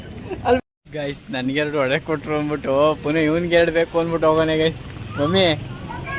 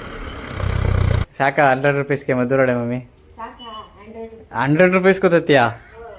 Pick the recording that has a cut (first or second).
second